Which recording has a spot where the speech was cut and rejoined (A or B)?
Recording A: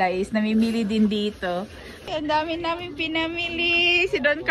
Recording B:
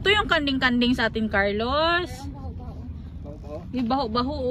A